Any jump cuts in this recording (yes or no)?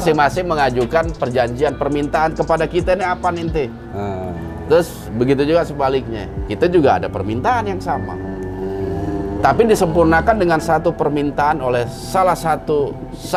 no